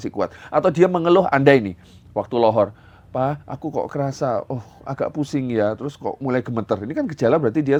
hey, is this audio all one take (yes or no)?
yes